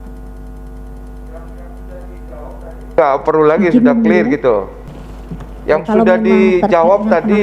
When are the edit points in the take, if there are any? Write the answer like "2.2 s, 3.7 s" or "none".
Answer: 4.8 s

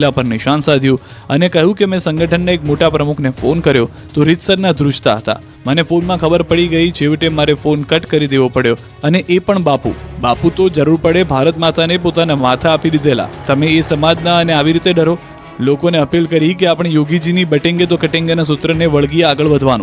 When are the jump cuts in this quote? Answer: none

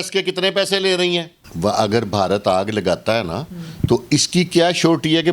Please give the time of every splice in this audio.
1.5 s

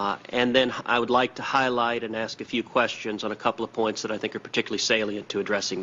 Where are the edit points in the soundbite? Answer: none

